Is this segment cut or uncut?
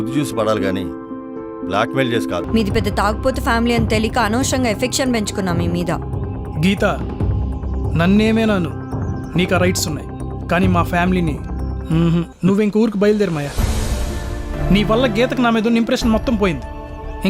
cut